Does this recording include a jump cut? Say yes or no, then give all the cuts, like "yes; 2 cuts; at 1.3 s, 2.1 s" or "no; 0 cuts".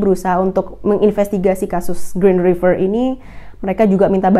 no; 0 cuts